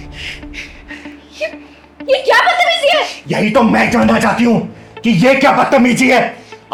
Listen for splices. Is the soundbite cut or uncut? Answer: uncut